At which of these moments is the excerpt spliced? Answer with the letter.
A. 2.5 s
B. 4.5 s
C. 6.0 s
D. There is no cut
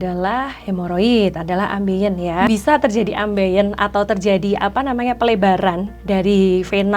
A